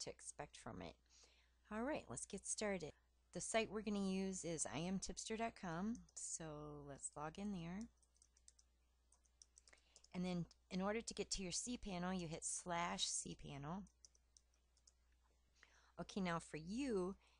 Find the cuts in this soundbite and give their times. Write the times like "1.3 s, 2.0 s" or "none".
3.0 s